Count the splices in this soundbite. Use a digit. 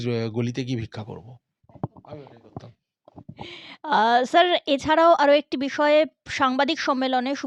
0